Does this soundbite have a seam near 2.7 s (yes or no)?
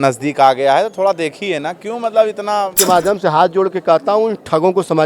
yes